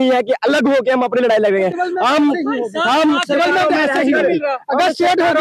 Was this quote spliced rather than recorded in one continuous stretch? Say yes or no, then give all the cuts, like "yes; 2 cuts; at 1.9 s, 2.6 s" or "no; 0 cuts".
no; 0 cuts